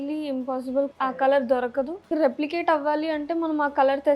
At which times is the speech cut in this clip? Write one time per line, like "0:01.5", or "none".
0:00.9
0:02.1